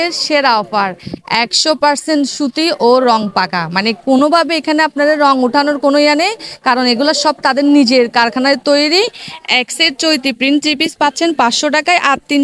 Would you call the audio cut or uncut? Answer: uncut